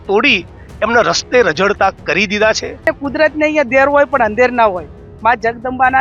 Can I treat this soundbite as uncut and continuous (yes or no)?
no